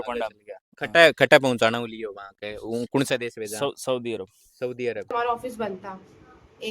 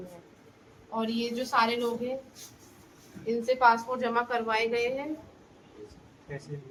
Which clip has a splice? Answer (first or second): first